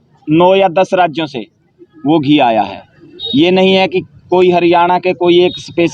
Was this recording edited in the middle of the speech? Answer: no; 0 cuts

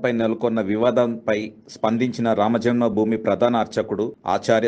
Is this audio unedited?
yes; 0 cuts

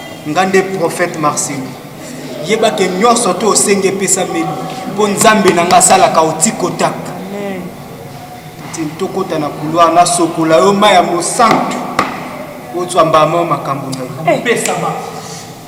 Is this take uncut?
yes; 0 cuts

